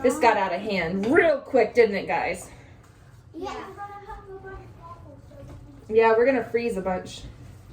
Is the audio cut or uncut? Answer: uncut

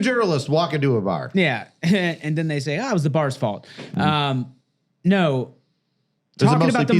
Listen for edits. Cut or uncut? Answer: uncut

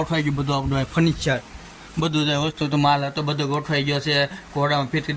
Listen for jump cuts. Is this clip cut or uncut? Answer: uncut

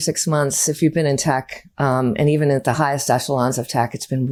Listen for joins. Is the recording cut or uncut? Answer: uncut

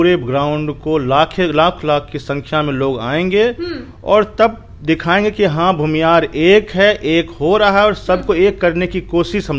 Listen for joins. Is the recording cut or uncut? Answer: uncut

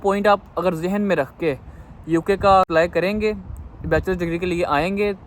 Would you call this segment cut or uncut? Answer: cut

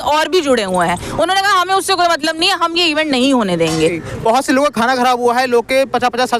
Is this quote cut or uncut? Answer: cut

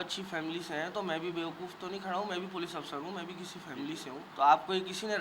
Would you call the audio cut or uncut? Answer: cut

